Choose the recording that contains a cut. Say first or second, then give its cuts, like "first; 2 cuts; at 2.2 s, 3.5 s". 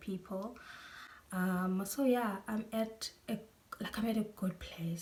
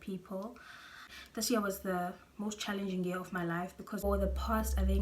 second; 2 cuts; at 1.1 s, 4.0 s